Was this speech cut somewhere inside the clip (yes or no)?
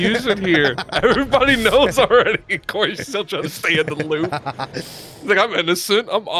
no